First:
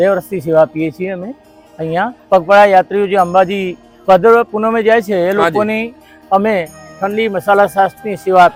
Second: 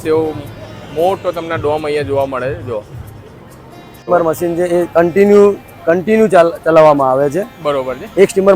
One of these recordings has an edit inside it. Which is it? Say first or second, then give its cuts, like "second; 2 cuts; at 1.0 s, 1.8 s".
second; 1 cut; at 4.1 s